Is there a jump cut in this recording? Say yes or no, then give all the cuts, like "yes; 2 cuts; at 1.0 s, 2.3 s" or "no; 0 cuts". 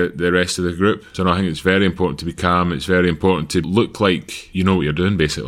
yes; 3 cuts; at 1.1 s, 3.6 s, 4.4 s